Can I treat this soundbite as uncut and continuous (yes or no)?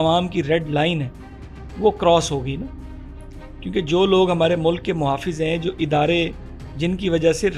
yes